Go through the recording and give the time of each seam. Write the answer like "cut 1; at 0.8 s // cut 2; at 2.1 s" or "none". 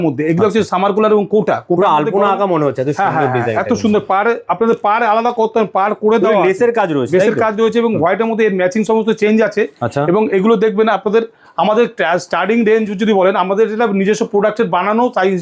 none